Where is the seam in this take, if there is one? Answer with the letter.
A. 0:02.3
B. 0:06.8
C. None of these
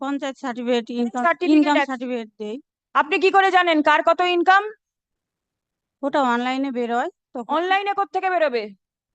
C